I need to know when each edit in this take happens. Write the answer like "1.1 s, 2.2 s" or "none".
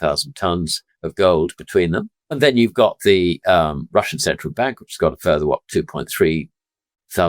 2.2 s